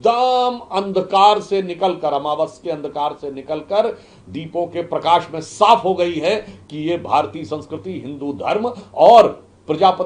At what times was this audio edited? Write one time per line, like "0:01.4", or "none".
none